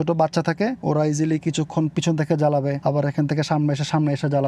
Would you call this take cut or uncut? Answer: cut